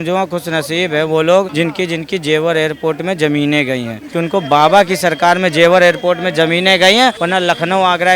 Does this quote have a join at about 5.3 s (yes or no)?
no